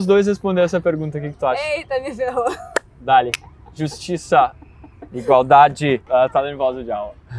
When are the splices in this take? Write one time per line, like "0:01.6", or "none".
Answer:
0:06.0